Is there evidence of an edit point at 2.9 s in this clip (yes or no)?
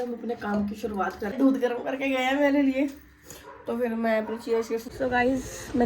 no